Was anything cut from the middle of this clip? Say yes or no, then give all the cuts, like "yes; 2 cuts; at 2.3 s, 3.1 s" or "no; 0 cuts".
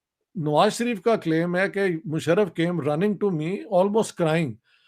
no; 0 cuts